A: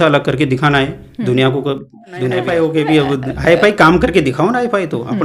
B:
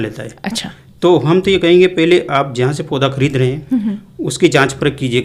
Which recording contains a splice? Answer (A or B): A